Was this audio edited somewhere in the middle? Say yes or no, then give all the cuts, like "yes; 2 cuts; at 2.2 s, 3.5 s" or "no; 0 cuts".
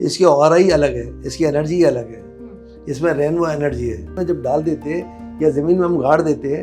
yes; 1 cut; at 4.2 s